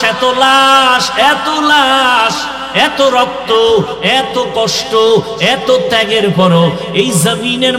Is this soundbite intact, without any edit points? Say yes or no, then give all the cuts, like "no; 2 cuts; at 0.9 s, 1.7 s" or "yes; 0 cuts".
yes; 0 cuts